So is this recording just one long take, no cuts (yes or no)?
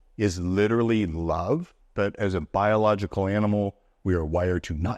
no